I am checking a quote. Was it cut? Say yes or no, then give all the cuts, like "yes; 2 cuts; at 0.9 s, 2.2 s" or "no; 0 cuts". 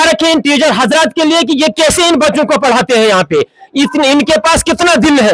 no; 0 cuts